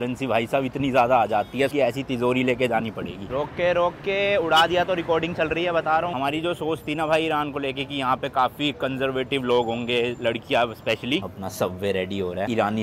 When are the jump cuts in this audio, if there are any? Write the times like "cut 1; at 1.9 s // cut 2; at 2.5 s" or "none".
cut 1; at 1.7 s // cut 2; at 3.3 s // cut 3; at 6.1 s // cut 4; at 11.2 s